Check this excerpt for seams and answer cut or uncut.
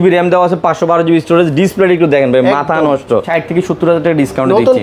cut